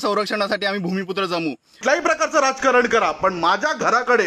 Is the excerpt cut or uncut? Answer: cut